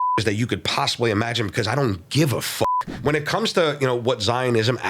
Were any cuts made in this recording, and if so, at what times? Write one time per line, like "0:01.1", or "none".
0:02.9